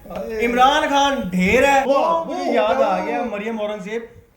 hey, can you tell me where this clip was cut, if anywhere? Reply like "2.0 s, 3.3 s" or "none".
1.9 s